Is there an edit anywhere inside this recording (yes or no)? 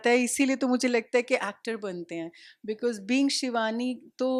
no